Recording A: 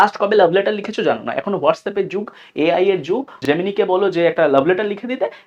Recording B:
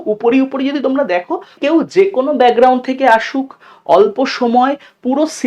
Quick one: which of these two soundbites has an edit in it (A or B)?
B